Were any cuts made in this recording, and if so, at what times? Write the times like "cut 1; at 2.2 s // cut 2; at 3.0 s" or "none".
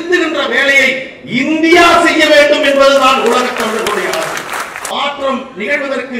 cut 1; at 4.9 s